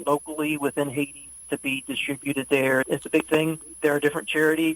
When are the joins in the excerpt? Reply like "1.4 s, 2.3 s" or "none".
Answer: 2.9 s